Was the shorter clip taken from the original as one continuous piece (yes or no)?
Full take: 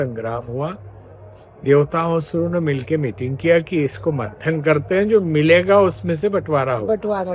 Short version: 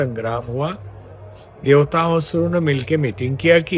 yes